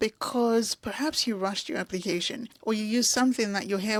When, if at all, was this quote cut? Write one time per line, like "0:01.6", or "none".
none